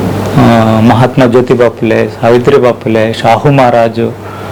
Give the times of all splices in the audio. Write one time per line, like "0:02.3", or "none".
none